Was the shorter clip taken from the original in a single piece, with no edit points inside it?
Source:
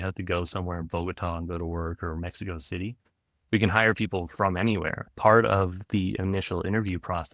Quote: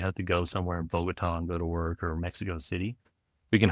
yes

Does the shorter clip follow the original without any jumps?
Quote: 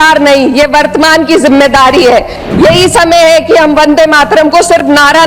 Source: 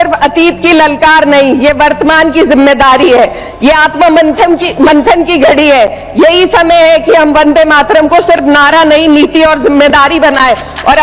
no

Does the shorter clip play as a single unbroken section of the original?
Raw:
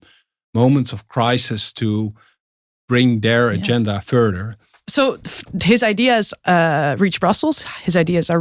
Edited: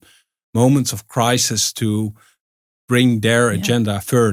yes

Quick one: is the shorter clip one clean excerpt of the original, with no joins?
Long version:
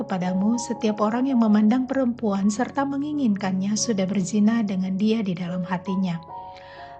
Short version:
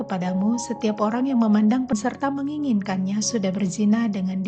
no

